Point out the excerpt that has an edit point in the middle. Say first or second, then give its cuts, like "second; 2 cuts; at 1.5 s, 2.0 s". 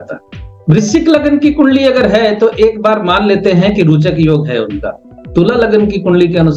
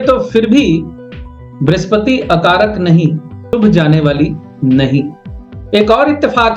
second; 1 cut; at 3.5 s